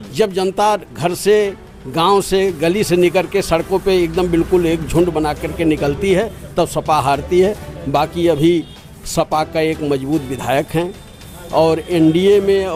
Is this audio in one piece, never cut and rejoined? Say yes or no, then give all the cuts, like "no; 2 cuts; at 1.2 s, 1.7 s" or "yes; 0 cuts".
yes; 0 cuts